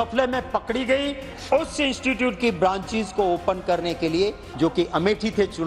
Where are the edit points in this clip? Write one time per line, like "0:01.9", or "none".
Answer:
0:01.2
0:04.4